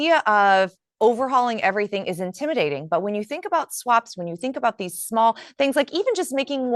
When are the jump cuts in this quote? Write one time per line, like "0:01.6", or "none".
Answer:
none